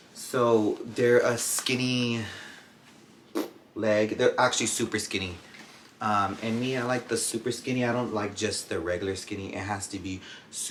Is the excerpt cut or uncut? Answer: uncut